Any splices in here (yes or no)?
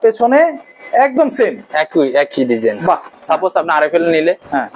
yes